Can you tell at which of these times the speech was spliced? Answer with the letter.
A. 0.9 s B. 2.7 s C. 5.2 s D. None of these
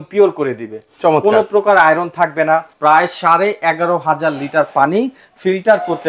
B